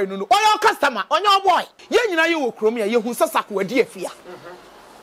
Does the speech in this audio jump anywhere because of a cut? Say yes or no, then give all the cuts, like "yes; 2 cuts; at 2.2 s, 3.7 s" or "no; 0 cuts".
yes; 1 cut; at 1.8 s